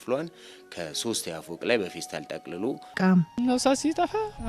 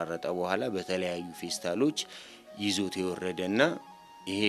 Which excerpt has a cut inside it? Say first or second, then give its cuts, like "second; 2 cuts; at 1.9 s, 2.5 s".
first; 1 cut; at 2.9 s